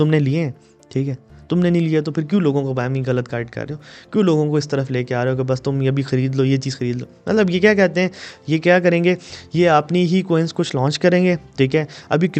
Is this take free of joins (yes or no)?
yes